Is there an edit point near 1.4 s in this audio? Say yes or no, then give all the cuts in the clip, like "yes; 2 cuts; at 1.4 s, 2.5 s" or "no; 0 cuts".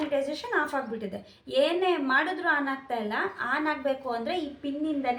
no; 0 cuts